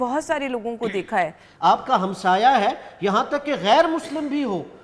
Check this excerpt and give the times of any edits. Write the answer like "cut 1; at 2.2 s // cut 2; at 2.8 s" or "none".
cut 1; at 1.4 s